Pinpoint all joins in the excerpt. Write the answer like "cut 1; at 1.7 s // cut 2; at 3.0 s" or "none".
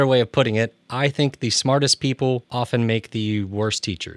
cut 1; at 2.5 s